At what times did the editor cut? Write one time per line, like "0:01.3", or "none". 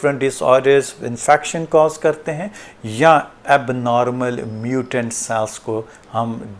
none